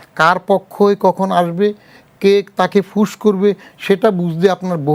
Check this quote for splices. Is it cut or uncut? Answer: uncut